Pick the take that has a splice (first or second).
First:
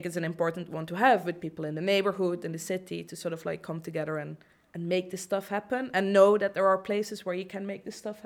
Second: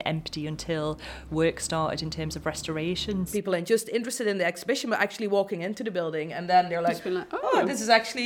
second